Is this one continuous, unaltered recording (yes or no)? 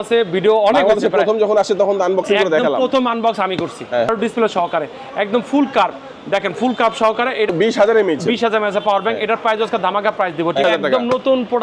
no